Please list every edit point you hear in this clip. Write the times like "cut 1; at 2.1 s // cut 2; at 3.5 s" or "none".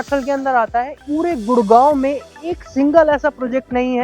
cut 1; at 1.0 s